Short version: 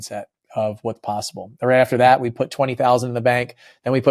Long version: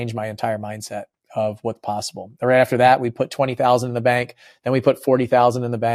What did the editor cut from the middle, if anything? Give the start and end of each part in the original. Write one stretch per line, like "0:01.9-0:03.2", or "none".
none